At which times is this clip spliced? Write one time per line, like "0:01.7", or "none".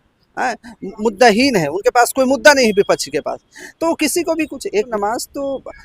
0:04.9

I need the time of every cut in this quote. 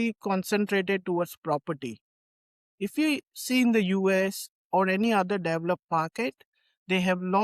none

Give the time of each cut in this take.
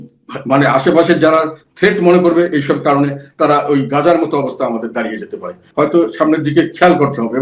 0:05.6

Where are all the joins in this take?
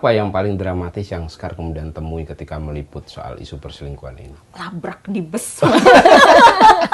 none

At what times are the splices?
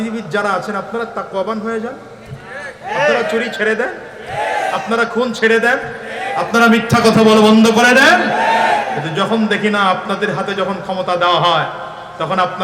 none

